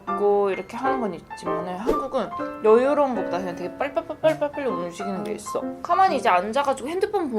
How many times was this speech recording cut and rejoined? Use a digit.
1